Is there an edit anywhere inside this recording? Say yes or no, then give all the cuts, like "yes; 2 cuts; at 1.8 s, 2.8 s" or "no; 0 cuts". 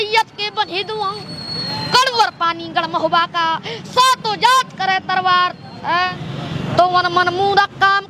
yes; 1 cut; at 6.1 s